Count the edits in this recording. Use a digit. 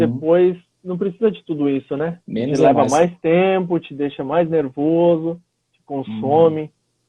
1